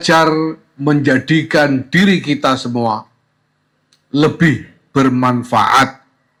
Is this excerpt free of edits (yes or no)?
yes